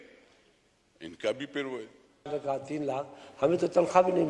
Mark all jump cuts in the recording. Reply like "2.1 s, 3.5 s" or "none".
2.3 s